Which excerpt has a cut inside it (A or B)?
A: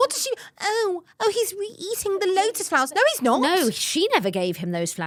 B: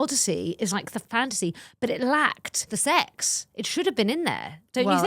B